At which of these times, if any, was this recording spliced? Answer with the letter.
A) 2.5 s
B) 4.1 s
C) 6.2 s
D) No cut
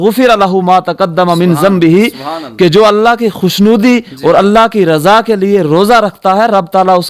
D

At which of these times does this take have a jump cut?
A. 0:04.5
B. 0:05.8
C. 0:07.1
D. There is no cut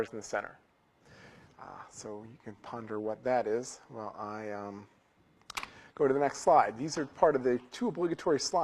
A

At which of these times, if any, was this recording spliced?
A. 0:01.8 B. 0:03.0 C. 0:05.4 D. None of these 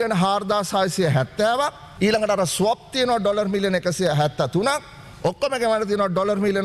A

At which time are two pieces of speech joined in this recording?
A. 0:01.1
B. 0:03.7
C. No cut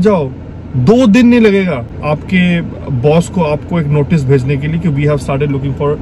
C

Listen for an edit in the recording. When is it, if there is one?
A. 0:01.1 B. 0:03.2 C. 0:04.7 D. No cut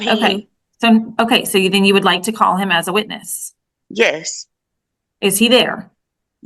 A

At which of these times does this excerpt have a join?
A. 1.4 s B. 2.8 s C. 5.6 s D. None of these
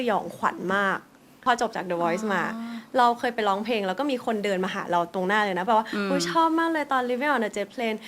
A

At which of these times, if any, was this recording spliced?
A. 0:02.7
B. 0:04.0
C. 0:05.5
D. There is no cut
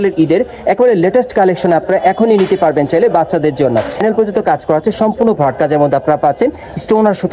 B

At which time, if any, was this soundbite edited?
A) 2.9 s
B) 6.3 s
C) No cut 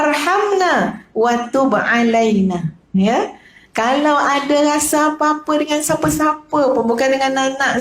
A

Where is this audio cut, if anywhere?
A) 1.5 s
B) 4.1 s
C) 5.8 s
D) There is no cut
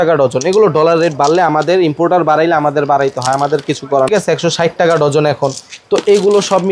B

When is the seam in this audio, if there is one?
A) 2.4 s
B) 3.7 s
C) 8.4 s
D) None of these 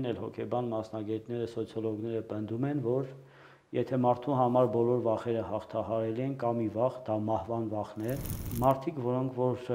C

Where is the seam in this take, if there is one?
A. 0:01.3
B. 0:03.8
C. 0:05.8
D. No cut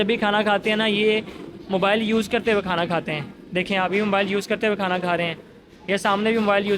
D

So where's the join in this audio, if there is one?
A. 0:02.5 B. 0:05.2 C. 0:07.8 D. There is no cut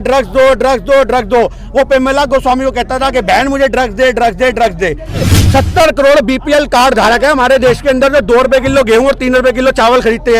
B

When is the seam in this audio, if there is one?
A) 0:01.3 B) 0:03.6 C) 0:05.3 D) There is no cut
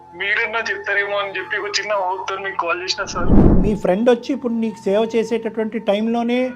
B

